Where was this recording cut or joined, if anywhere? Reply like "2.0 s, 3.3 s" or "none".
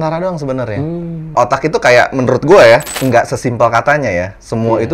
2.9 s